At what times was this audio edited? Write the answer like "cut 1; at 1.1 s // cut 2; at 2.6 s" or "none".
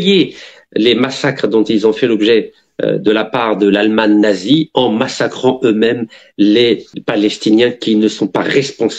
cut 1; at 6.9 s

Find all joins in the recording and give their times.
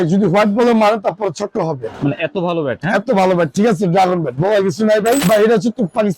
cut 1; at 1.9 s // cut 2; at 5.2 s

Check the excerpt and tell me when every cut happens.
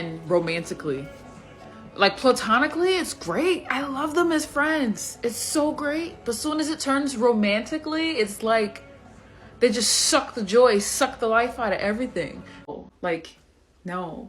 cut 1; at 8.8 s // cut 2; at 12.7 s

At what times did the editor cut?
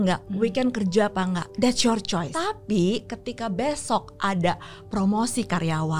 cut 1; at 1.5 s // cut 2; at 2.3 s

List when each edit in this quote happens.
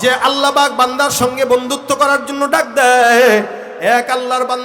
none

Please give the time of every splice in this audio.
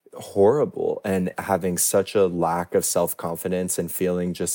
cut 1; at 1.3 s

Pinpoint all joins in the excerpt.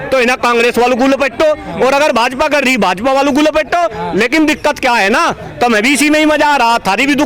none

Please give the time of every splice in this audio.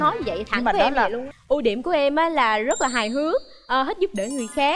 cut 1; at 1.3 s

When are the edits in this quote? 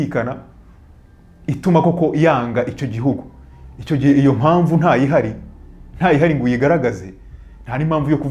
none

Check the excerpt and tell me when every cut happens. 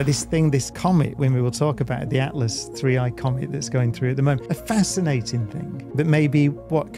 none

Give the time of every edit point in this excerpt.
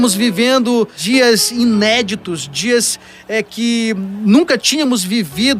cut 1; at 1.0 s

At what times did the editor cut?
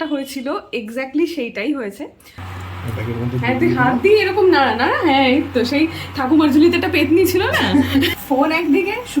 cut 1; at 2.4 s // cut 2; at 8.2 s

